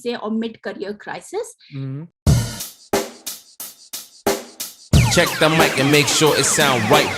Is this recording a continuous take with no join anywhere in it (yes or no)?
no